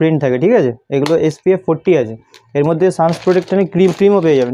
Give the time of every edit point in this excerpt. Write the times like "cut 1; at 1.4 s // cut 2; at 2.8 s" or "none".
none